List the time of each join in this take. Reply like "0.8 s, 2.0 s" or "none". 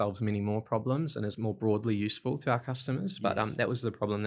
1.3 s

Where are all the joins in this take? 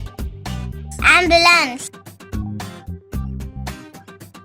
0.8 s, 1.8 s

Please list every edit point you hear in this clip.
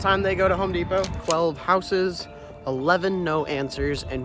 1.2 s

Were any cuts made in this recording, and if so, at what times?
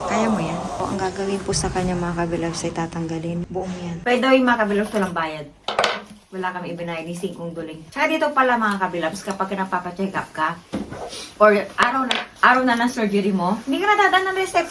4.0 s

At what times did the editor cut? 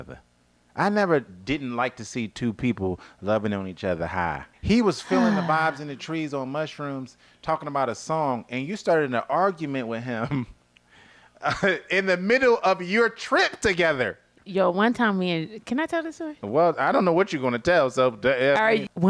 4.5 s

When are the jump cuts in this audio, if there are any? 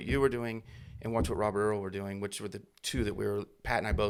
none

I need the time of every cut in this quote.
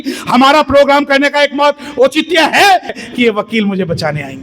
2.9 s

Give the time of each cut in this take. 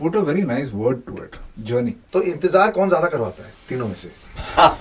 2.0 s

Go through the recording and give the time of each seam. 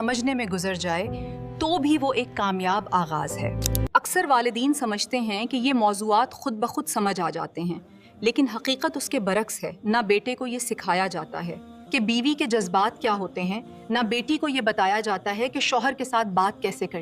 none

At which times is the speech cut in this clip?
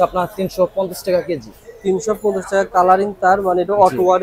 none

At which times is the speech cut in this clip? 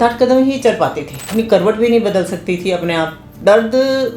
1.3 s, 3.2 s

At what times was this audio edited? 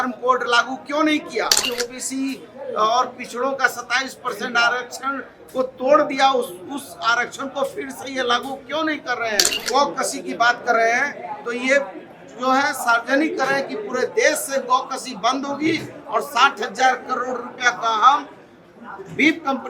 1.6 s, 9.6 s

